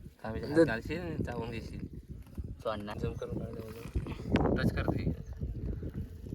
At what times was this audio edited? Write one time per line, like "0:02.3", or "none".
0:03.0